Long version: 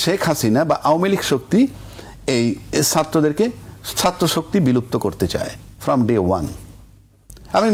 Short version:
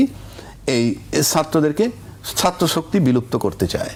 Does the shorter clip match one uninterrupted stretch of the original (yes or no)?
yes